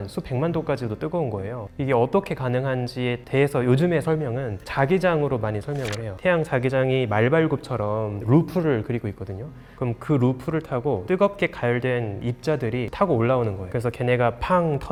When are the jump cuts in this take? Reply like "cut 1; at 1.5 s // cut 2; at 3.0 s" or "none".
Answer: none